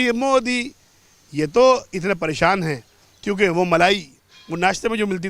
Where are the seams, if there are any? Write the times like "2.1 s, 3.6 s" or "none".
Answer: none